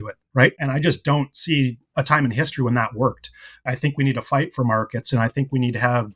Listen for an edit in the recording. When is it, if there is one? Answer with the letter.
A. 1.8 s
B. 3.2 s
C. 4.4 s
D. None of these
D